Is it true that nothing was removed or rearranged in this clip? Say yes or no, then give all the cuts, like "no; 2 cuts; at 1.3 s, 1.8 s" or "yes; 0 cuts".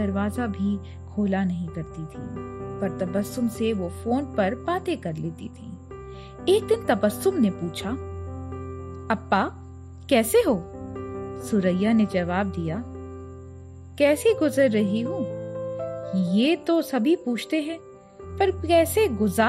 yes; 0 cuts